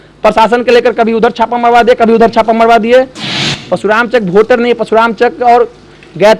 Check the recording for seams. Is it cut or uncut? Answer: cut